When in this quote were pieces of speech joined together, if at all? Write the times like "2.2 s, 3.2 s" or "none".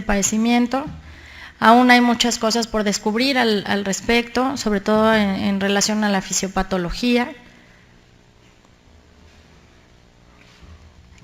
3.0 s